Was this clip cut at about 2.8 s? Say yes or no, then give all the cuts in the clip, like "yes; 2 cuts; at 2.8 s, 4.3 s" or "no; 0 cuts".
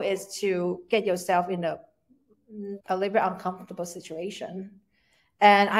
yes; 1 cut; at 2.8 s